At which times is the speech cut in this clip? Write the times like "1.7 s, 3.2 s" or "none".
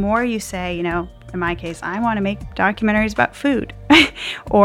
2.4 s